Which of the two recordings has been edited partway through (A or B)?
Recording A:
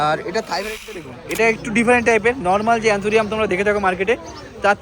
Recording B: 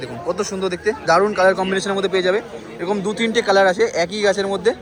A